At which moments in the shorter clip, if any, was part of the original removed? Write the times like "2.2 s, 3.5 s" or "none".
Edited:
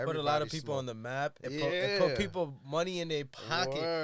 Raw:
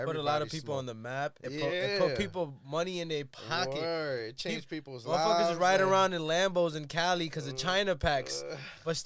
none